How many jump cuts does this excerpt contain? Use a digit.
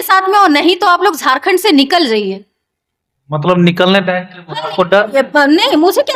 0